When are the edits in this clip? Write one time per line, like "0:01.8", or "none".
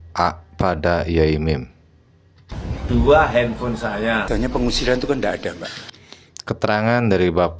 0:04.2